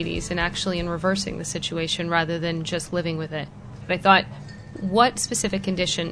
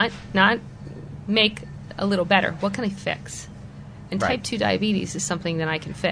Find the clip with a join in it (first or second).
first